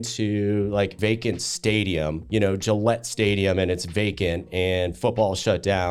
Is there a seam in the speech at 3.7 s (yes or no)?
no